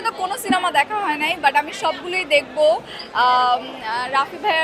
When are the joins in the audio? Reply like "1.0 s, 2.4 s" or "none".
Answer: none